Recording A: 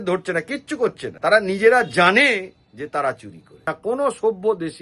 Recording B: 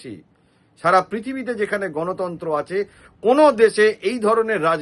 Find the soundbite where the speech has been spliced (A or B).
A